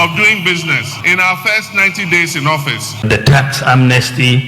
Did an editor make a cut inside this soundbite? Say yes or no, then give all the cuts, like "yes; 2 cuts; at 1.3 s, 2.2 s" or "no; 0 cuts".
yes; 2 cuts; at 0.9 s, 3.1 s